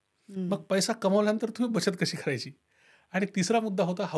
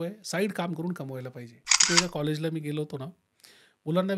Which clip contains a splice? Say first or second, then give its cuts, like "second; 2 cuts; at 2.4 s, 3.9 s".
second; 1 cut; at 1.8 s